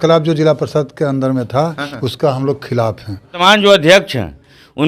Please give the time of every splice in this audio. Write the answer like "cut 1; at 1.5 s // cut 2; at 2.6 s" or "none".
cut 1; at 3.4 s